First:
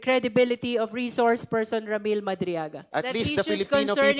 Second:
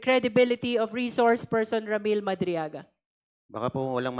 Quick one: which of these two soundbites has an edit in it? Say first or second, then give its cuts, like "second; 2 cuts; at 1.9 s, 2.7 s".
first; 1 cut; at 2.8 s